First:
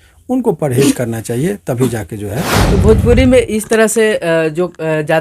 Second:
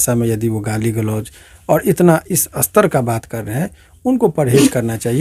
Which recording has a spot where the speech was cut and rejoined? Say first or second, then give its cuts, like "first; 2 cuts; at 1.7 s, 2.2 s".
first; 1 cut; at 2.8 s